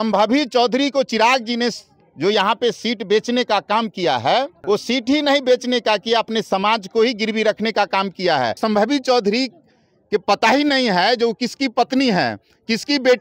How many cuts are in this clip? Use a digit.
2